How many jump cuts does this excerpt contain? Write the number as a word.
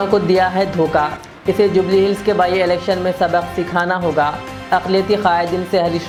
zero